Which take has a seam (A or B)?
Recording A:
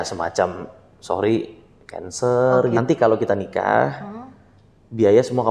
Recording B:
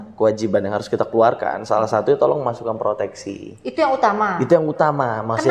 A